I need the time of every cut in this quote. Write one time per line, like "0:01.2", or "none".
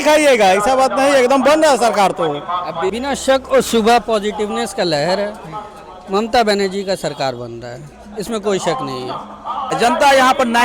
0:02.9
0:09.7